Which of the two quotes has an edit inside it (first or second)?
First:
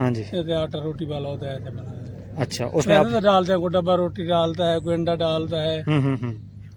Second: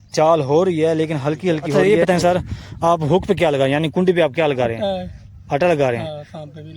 second